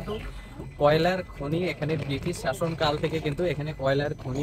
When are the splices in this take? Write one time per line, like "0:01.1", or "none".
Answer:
none